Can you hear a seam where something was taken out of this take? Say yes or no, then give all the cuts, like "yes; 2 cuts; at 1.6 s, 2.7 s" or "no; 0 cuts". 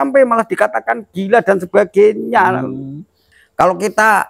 yes; 1 cut; at 3.3 s